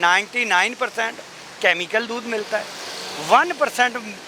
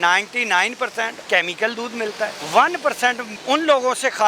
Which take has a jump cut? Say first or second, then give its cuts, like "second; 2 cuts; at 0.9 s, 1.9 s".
second; 3 cuts; at 1.2 s, 2.4 s, 3.3 s